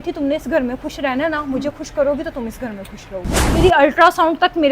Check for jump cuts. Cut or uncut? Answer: cut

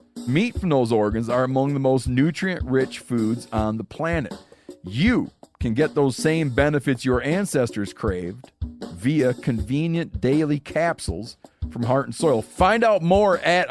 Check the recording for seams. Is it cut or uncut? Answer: uncut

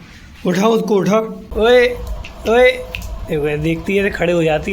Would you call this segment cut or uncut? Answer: cut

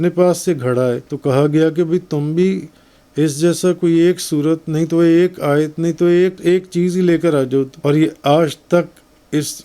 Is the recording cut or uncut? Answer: cut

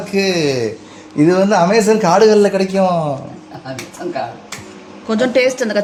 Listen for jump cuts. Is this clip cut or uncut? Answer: uncut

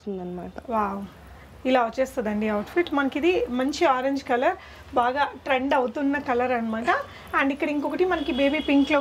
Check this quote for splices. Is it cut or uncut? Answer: uncut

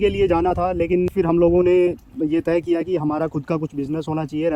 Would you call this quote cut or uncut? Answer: uncut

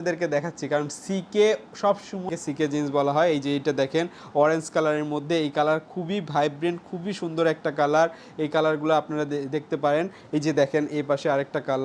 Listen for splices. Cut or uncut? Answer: cut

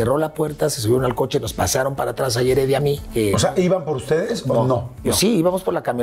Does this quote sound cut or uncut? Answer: cut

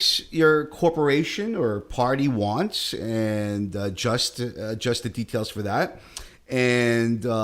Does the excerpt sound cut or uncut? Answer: uncut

